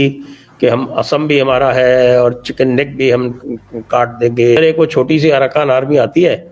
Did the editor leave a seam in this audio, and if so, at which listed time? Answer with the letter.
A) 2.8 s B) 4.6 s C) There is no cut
B